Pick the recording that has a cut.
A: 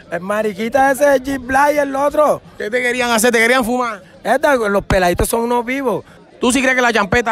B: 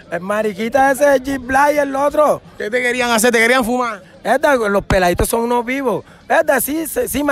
A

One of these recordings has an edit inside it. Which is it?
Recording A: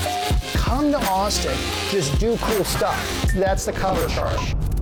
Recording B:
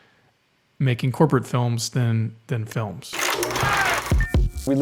B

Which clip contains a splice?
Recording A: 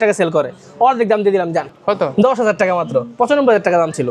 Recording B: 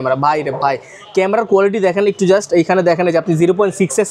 A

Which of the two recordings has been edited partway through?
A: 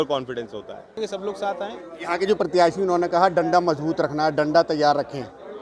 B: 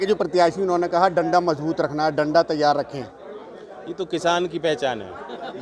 A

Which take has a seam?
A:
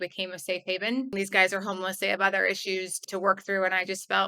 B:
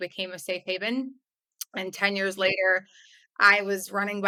A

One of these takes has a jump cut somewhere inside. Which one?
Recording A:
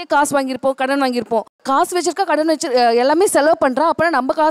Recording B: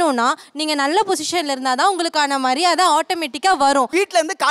A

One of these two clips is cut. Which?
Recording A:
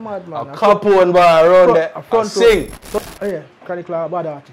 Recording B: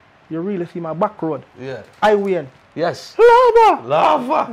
A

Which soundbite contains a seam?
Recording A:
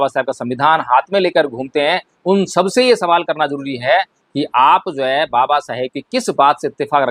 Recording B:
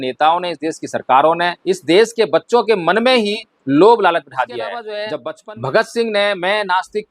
B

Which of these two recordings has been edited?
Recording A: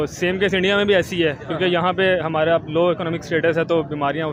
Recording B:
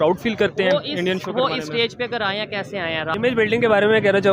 B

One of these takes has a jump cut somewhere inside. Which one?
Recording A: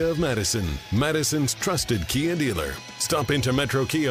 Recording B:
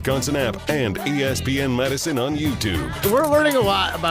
B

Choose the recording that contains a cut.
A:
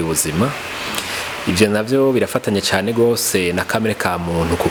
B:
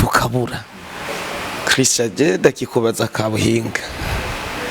B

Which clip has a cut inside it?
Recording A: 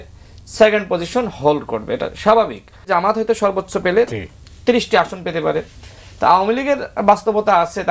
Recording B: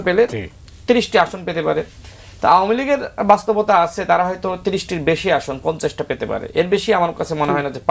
A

